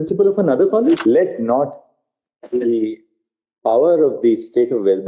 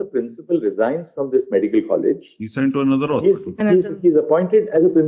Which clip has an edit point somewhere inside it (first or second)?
first